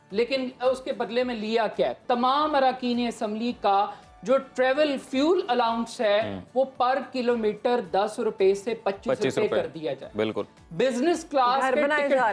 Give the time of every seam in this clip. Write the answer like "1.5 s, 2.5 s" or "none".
2.0 s